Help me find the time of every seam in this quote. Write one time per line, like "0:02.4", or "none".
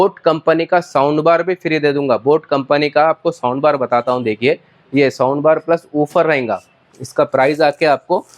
none